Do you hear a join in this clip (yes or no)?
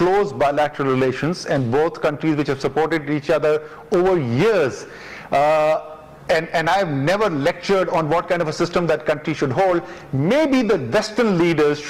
no